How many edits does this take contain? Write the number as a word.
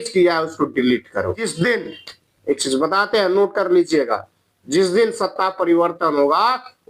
one